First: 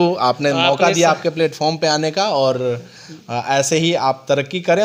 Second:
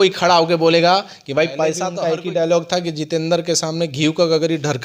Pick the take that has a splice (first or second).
second